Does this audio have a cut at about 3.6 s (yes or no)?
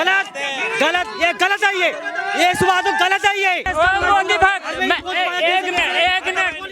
yes